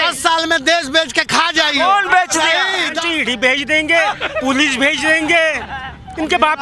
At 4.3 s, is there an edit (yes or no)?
no